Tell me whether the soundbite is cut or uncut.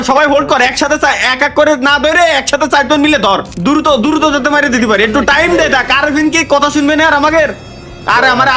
cut